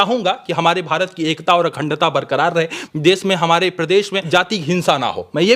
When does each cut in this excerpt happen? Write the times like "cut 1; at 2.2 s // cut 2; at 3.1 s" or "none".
cut 1; at 2.8 s // cut 2; at 4.2 s